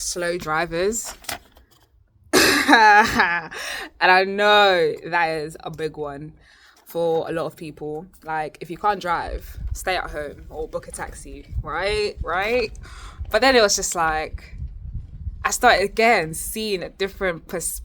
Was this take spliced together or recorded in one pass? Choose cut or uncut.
uncut